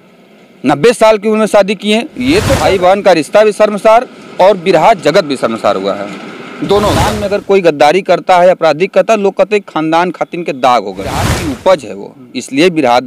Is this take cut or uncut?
cut